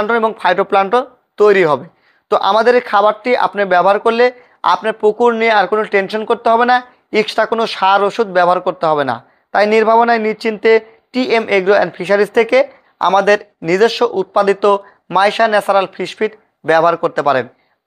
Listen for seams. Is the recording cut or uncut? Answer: uncut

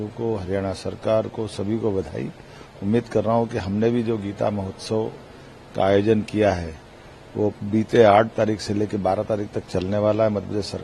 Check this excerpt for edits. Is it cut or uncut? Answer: uncut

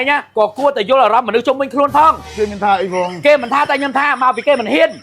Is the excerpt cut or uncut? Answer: uncut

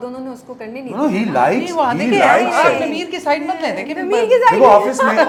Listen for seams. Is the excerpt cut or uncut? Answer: uncut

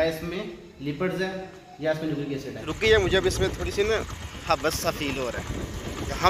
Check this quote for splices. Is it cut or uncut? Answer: cut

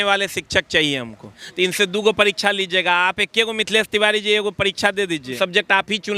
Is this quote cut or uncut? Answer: cut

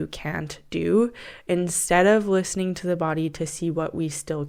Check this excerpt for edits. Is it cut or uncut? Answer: uncut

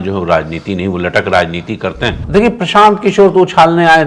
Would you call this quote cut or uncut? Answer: cut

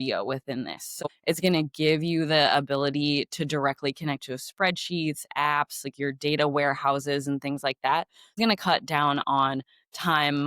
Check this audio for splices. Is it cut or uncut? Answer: cut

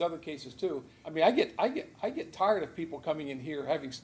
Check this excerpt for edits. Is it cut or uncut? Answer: cut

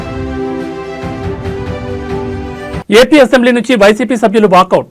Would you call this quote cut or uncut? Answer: cut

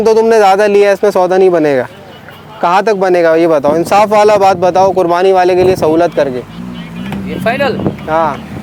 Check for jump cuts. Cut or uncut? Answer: uncut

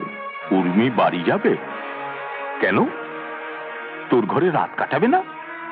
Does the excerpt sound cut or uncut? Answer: uncut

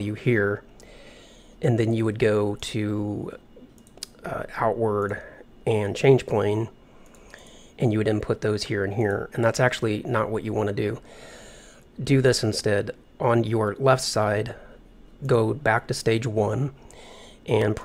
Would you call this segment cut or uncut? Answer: cut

